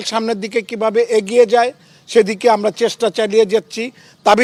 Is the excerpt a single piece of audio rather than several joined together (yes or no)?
yes